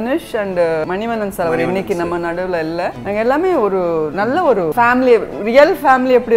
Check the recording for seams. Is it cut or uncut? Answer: cut